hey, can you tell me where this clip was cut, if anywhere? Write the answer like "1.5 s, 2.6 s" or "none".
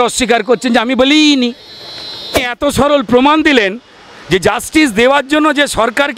2.5 s